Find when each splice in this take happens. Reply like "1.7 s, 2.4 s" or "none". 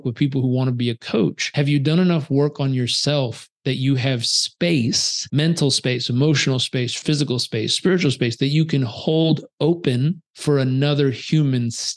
1.4 s, 5.1 s, 7.0 s, 10.3 s